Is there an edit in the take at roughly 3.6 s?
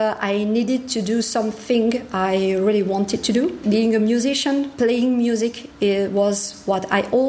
yes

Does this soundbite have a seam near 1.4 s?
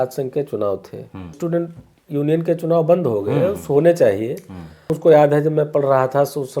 yes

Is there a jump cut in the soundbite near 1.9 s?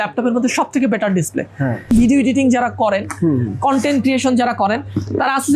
yes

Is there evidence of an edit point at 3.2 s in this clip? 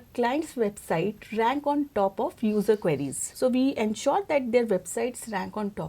yes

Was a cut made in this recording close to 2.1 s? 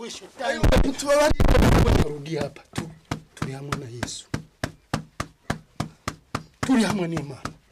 yes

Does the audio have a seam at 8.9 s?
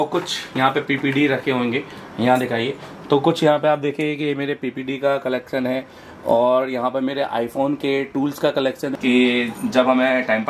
yes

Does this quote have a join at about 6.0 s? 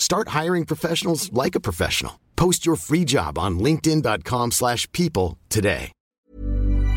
yes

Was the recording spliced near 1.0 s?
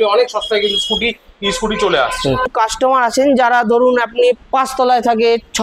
no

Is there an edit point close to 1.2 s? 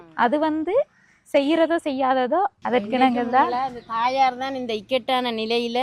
no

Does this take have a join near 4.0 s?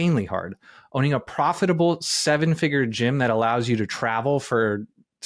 no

